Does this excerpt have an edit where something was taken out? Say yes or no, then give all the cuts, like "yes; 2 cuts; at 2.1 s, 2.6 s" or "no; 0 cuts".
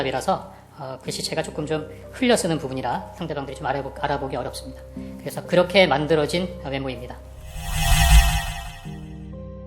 yes; 2 cuts; at 7.4 s, 8.8 s